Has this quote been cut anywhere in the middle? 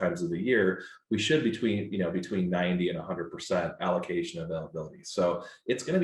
no; 0 cuts

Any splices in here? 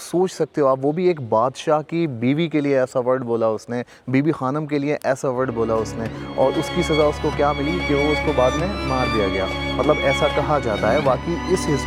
no; 0 cuts

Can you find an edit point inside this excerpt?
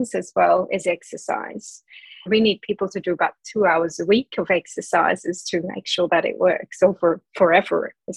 yes; 1 cut; at 2.3 s

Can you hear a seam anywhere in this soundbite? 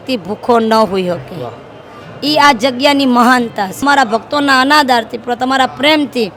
no; 0 cuts

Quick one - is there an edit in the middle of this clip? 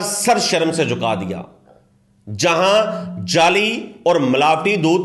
no; 0 cuts

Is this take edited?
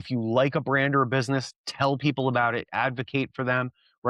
no; 0 cuts

